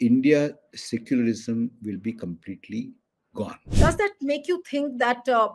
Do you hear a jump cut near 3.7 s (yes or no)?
yes